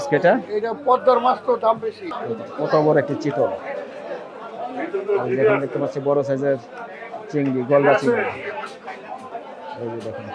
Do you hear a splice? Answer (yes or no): yes